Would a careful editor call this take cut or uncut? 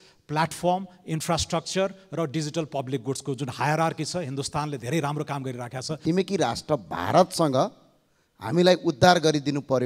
cut